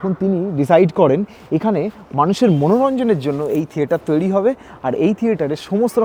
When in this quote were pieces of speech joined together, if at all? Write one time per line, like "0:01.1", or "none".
none